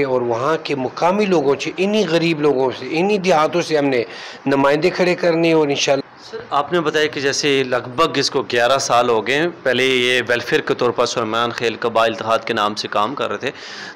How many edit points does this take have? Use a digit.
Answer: 1